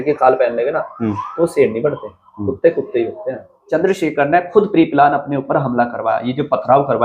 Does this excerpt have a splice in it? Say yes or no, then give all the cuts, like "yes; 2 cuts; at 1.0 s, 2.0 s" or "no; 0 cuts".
yes; 1 cut; at 3.6 s